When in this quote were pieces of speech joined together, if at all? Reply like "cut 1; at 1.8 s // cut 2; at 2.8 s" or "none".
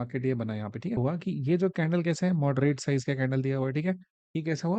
cut 1; at 1.0 s

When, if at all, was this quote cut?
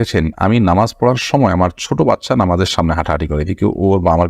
none

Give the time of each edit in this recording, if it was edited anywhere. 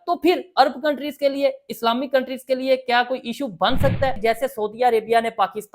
cut 1; at 4.2 s

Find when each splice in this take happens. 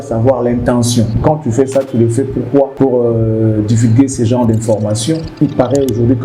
cut 1; at 1.1 s // cut 2; at 2.7 s // cut 3; at 5.3 s

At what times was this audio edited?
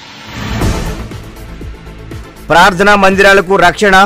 cut 1; at 2.3 s

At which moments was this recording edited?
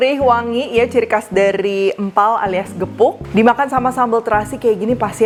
none

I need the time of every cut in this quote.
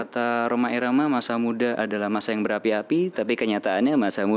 none

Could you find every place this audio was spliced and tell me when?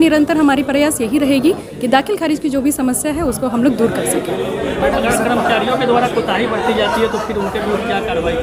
none

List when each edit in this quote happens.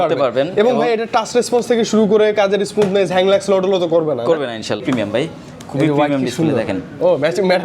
cut 1; at 4.8 s

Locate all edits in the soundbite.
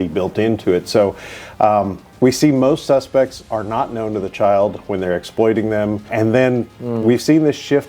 cut 1; at 6.1 s

